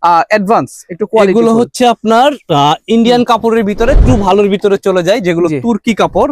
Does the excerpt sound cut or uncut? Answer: cut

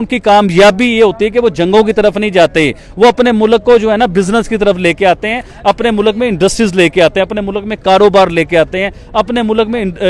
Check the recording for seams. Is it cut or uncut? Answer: uncut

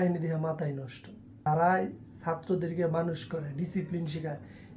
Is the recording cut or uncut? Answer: cut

